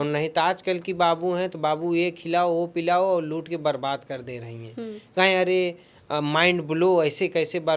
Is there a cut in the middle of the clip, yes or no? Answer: no